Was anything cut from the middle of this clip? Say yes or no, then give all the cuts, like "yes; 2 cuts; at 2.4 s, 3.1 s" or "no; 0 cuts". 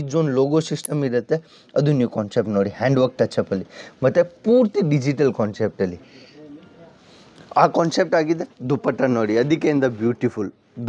no; 0 cuts